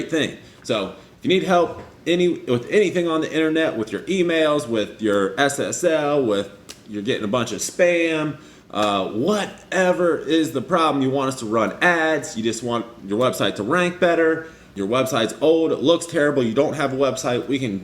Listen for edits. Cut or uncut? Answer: cut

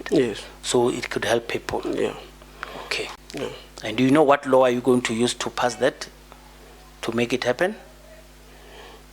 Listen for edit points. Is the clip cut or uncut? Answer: cut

